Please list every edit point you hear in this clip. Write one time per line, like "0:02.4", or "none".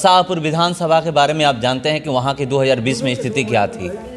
none